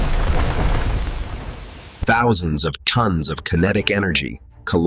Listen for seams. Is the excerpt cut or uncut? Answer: uncut